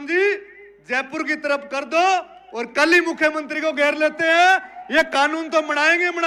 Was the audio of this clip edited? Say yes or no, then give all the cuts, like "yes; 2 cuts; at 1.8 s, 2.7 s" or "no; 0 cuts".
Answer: no; 0 cuts